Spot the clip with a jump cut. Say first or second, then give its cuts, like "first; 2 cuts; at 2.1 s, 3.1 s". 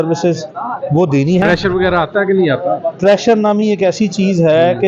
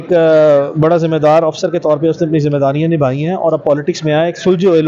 first; 1 cut; at 1.4 s